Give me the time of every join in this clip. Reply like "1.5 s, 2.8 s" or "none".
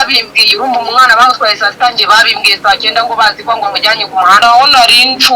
4.4 s